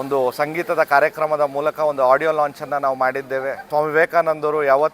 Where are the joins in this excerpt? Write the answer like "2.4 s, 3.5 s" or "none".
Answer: 3.7 s